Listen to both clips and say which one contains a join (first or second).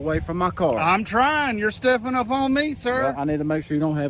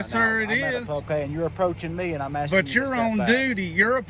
second